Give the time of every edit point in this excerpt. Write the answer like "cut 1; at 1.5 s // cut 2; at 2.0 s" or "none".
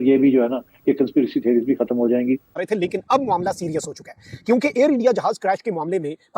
cut 1; at 2.5 s

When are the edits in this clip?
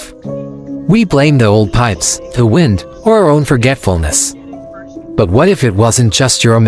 none

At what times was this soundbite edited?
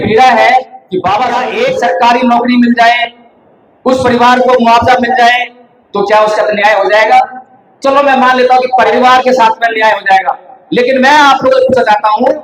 cut 1; at 1.5 s // cut 2; at 8.9 s

